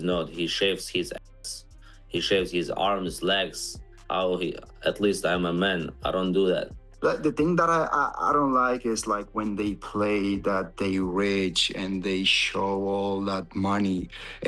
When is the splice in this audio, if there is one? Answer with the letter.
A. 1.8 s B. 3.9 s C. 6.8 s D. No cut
C